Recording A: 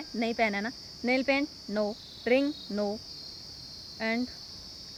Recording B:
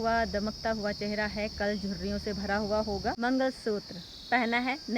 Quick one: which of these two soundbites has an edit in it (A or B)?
B